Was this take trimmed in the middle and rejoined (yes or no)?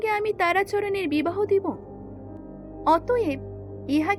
no